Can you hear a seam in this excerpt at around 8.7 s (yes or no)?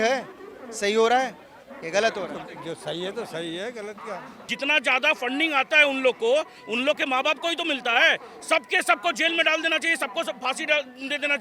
no